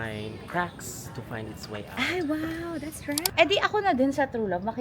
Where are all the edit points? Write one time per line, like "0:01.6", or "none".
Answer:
0:03.3

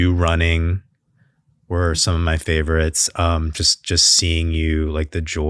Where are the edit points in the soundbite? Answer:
none

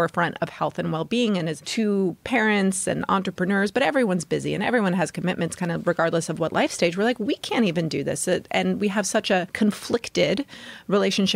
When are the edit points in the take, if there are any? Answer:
0:01.6
0:09.5

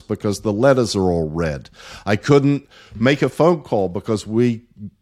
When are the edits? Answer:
none

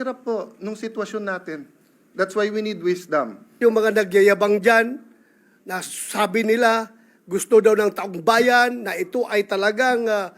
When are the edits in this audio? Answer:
0:03.5

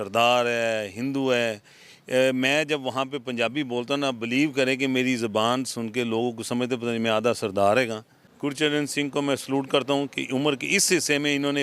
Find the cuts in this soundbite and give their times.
0:08.2

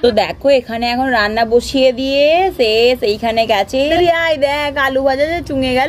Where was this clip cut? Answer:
0:03.9

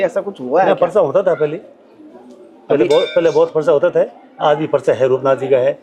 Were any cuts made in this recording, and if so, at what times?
none

